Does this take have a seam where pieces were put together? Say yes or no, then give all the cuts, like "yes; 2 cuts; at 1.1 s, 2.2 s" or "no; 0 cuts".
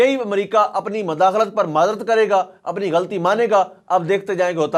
no; 0 cuts